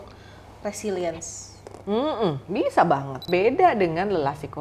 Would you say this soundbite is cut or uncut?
cut